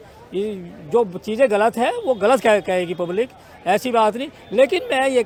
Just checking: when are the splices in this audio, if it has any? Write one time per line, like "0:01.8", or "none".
none

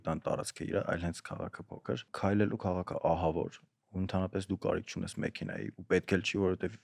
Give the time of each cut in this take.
0:02.1

